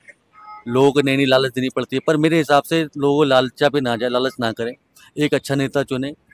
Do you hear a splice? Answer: no; 0 cuts

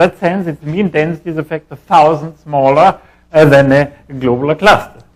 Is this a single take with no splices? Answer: yes; 0 cuts

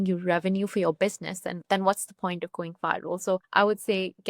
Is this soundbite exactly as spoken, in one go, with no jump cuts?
no; 2 cuts; at 1.5 s, 3.5 s

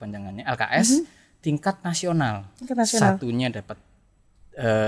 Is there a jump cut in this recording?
no; 0 cuts

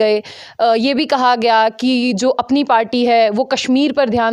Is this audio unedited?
yes; 0 cuts

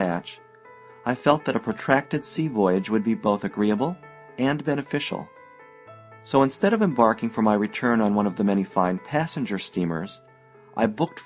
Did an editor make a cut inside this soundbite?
no; 0 cuts

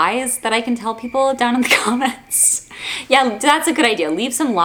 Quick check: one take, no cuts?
yes; 0 cuts

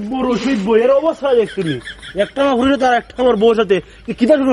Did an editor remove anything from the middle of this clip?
no; 0 cuts

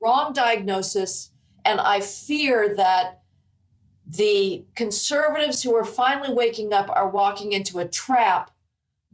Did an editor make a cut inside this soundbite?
no; 0 cuts

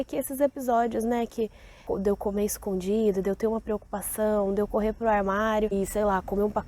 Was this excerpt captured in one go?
no; 2 cuts; at 1.8 s, 5.7 s

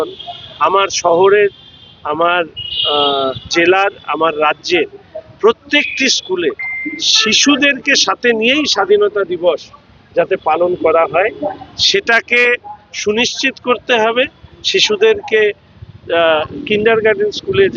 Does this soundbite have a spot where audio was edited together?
no; 0 cuts

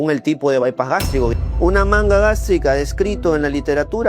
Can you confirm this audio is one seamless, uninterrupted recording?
no; 1 cut; at 1.3 s

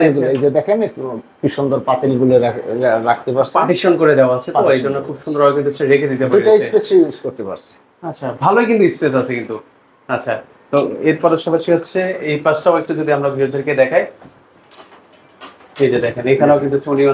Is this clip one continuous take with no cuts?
yes; 0 cuts

